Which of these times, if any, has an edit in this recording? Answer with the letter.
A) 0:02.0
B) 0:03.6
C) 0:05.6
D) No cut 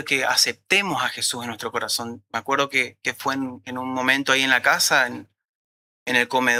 D